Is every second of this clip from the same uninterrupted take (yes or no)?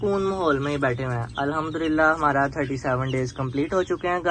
yes